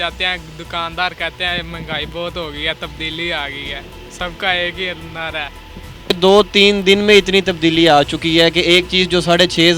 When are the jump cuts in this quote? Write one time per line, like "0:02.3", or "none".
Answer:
0:06.1